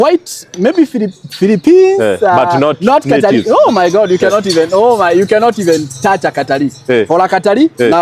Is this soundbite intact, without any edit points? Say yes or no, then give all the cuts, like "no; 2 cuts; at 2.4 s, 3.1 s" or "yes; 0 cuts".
yes; 0 cuts